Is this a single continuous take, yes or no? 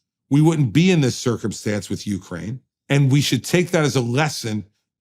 no